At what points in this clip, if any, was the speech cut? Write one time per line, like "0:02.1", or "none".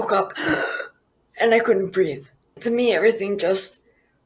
0:02.5